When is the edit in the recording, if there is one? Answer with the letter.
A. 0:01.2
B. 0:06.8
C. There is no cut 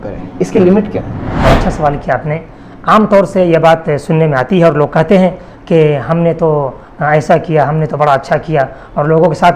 A